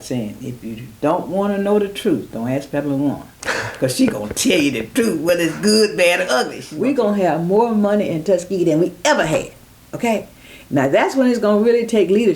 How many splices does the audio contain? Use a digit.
1